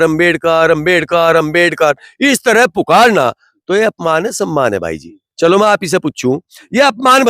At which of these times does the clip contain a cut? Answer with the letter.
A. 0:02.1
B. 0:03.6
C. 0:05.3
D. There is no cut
D